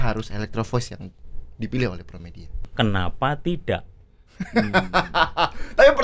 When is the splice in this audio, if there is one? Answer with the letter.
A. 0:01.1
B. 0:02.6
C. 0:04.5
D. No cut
B